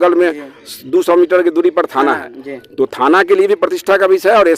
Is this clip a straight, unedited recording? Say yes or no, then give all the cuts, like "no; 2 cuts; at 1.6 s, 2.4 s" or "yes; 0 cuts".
yes; 0 cuts